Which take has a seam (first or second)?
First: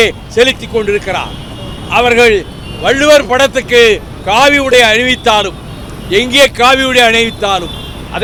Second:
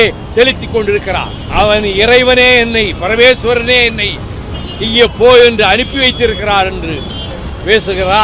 second